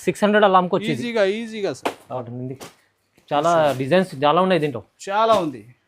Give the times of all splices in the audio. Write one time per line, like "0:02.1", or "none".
0:02.2